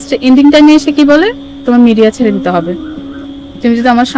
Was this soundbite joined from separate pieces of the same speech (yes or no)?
yes